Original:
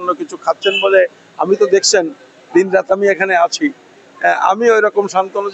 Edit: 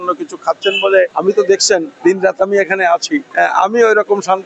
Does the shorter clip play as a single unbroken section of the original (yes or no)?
no